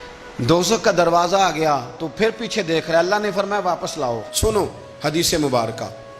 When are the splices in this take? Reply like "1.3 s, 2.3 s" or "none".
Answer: 4.3 s